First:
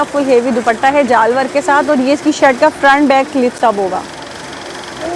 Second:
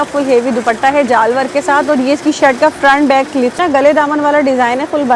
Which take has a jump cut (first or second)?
second